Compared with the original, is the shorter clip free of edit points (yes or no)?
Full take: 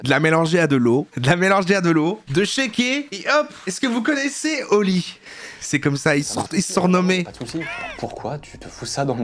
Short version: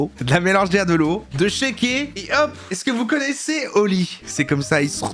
no